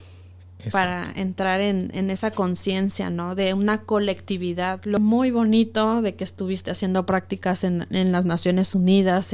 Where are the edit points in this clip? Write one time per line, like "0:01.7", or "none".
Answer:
0:05.0